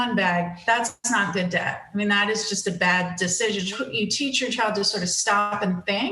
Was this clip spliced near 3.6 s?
yes; 1 cut; at 3.6 s

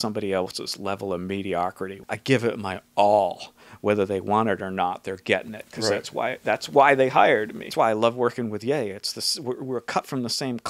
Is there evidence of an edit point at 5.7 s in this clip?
no; 2 cuts; at 1.9 s, 7.6 s

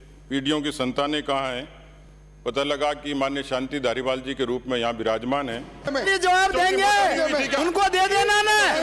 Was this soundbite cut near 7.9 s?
no; 1 cut; at 5.8 s

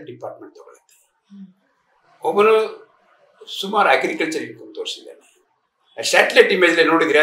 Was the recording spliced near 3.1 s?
no; 0 cuts

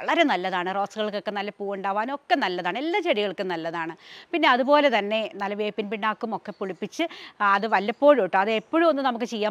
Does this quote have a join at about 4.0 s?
no; 0 cuts

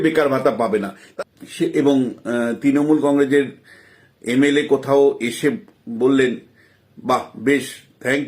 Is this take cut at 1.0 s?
yes; 1 cut; at 1.0 s

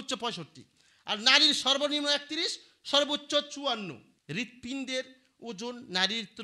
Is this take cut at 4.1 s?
yes; 1 cut; at 4.1 s

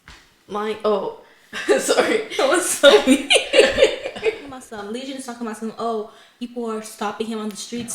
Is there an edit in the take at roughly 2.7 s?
no; 1 cut; at 4.7 s

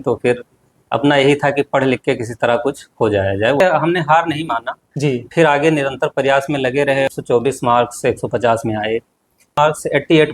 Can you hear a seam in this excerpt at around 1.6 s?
no; 3 cuts; at 3.6 s, 7.1 s, 9.6 s

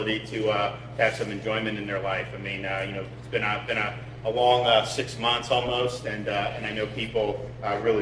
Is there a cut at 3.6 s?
no; 0 cuts

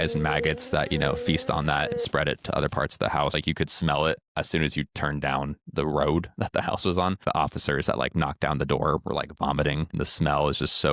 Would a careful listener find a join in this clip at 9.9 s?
yes; 4 cuts; at 3.4 s, 4.3 s, 7.2 s, 9.9 s

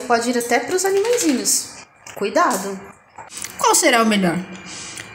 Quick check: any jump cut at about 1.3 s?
no; 1 cut; at 3.3 s

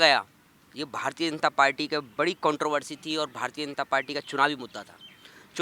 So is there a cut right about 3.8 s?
no; 0 cuts

